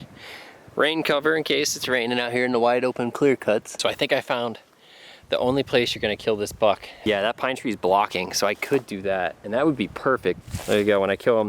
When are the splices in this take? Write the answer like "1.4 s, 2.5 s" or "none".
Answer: 3.7 s, 7.1 s, 10.4 s

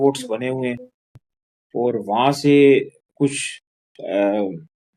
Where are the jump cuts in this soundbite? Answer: none

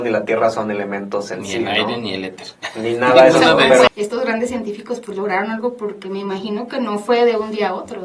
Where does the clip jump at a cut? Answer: 3.9 s

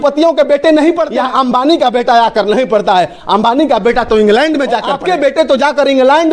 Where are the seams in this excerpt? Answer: 1.1 s, 4.9 s

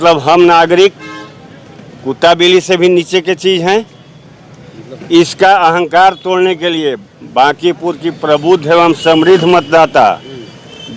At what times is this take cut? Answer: none

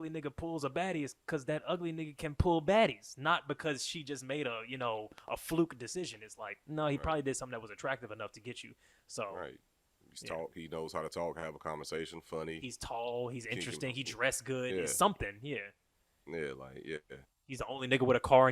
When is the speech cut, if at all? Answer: none

